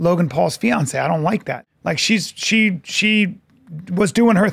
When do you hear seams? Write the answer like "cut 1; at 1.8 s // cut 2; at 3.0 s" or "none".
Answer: cut 1; at 1.6 s